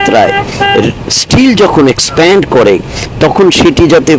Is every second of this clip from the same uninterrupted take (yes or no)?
yes